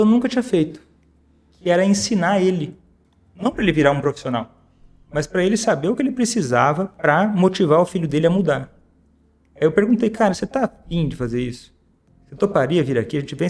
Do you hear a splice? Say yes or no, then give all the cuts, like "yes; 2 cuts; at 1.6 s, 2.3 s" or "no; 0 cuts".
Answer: no; 0 cuts